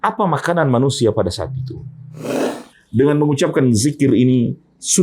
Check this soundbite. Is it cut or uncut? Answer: cut